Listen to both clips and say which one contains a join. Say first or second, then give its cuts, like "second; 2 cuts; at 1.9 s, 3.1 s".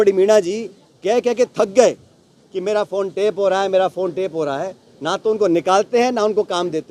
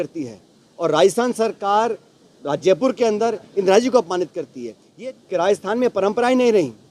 second; 1 cut; at 4.9 s